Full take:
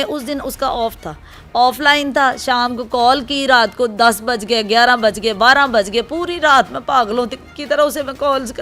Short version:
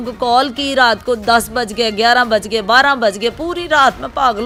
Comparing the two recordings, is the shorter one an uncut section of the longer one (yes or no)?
yes